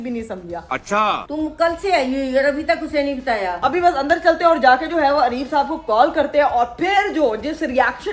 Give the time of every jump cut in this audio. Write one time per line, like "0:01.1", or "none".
0:01.1
0:03.5